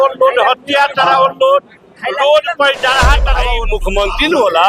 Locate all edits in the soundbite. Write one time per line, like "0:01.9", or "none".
0:03.6